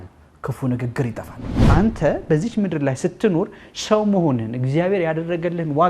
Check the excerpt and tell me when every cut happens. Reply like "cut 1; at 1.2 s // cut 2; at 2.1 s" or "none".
cut 1; at 1.6 s

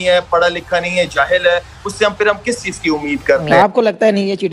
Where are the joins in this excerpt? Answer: cut 1; at 3.5 s

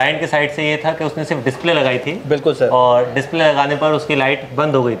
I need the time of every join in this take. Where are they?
none

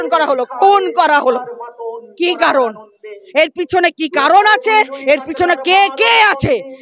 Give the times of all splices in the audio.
none

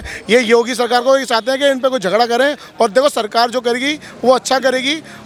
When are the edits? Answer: none

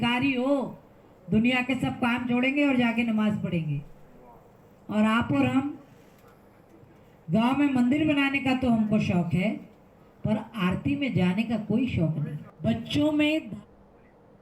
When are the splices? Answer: none

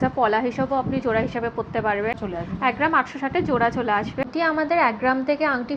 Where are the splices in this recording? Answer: cut 1; at 2.2 s // cut 2; at 4.2 s

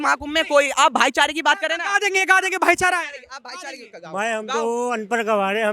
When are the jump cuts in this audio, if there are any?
none

